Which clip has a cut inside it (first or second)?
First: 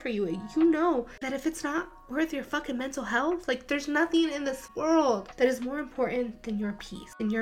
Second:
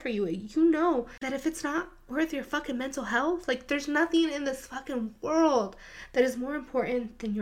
first